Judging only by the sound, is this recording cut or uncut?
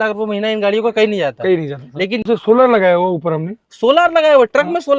cut